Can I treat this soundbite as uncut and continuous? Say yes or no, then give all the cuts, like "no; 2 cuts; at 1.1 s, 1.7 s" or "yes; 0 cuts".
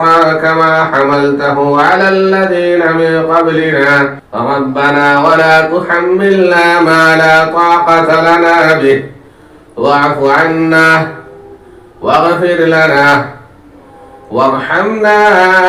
no; 1 cut; at 4.2 s